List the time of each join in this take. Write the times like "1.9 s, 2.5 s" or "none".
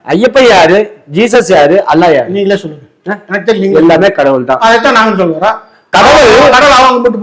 none